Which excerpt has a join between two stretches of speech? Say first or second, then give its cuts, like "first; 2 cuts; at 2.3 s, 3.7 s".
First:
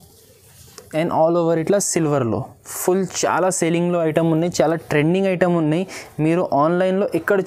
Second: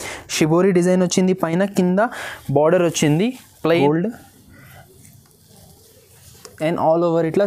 second; 1 cut; at 3.7 s